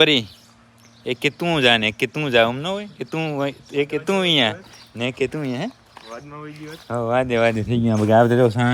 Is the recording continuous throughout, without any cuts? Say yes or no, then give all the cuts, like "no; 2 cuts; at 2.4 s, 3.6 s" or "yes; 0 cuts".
yes; 0 cuts